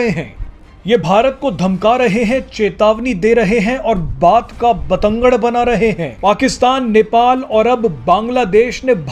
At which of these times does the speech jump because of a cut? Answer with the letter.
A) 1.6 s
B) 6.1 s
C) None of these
B